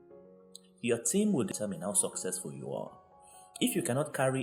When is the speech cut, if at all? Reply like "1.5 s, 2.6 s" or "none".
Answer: 1.5 s